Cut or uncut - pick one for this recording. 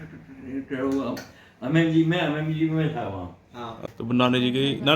cut